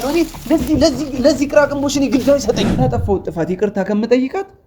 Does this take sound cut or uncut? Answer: cut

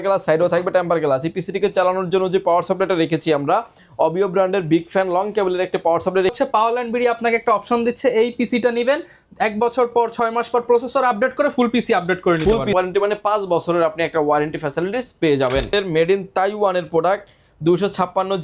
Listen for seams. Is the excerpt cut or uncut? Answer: cut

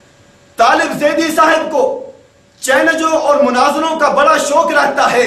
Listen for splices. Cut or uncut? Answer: cut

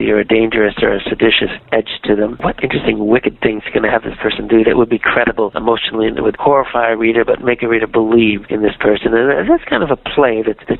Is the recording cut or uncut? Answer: cut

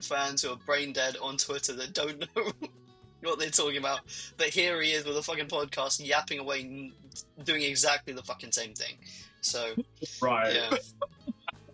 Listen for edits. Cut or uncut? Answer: uncut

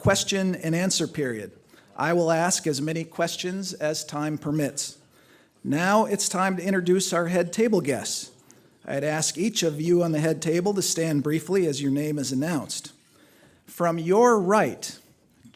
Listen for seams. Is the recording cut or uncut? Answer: cut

